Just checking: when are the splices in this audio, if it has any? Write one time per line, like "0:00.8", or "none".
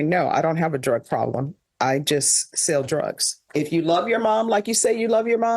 0:03.4